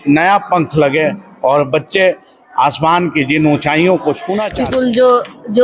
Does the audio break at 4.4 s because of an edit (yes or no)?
yes